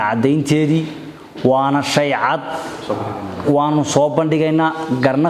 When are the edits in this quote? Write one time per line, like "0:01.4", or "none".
none